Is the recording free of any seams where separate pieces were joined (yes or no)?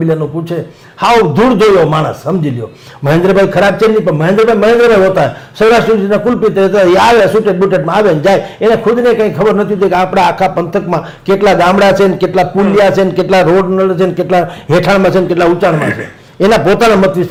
yes